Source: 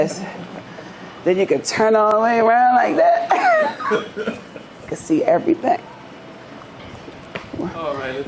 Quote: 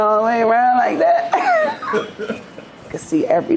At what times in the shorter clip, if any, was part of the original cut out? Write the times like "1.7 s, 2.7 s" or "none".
none

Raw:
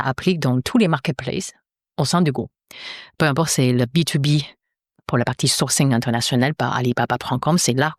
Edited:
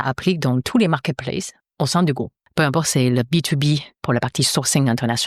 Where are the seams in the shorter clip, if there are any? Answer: 1.6 s, 2.4 s, 3.9 s

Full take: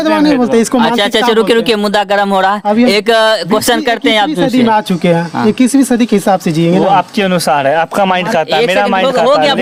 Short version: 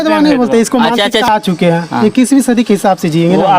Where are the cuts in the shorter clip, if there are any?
1.3 s

